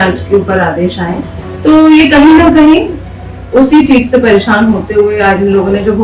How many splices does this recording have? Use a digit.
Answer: 0